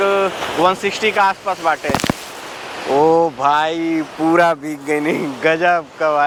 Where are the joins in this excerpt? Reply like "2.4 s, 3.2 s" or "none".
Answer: none